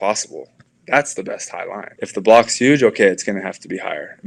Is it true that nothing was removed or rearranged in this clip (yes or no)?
no